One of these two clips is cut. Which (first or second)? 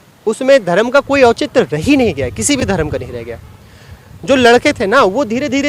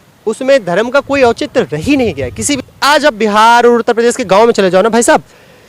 second